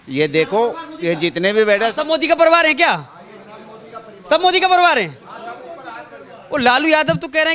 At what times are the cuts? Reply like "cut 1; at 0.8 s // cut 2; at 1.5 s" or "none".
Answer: none